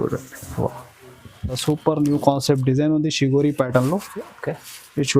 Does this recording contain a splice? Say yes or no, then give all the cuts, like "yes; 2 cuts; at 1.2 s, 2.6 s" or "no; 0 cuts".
yes; 1 cut; at 1.6 s